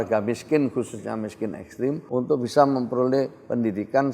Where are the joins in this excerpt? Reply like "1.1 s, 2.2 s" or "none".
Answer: 2.0 s

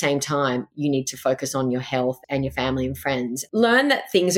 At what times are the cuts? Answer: 2.2 s, 3.5 s

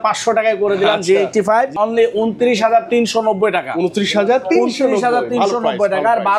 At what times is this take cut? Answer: 1.7 s

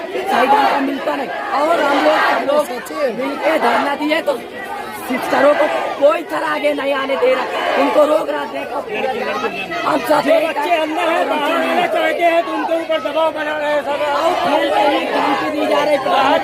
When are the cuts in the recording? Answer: none

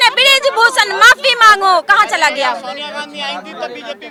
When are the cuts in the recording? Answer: none

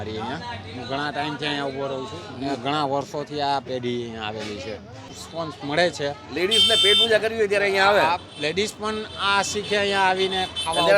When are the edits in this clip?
5.2 s

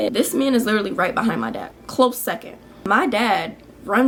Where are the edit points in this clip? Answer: none

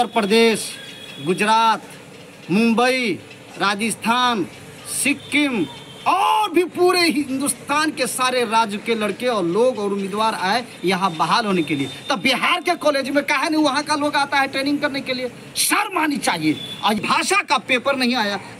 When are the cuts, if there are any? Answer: 17.0 s

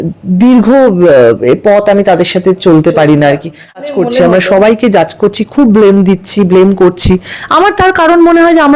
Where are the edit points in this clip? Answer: 3.8 s

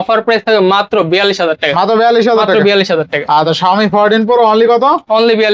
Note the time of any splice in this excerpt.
none

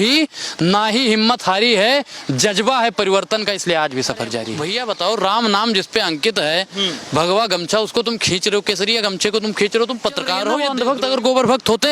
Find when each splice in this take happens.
4.6 s, 10.6 s

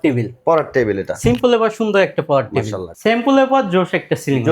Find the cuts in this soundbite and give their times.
2.8 s

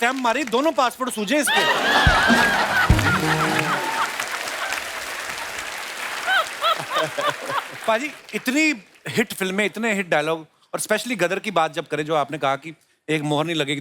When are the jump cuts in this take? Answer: none

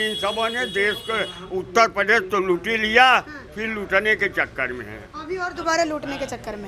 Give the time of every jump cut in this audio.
none

